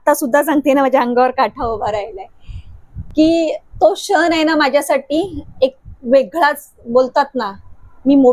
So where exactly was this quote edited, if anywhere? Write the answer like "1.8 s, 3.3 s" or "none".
none